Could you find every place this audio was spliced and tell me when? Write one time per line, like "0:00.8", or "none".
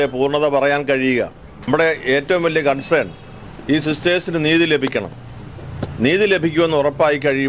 0:01.7